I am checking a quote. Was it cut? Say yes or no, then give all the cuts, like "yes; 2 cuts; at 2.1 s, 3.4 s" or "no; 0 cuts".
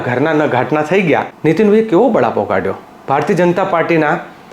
yes; 1 cut; at 1.3 s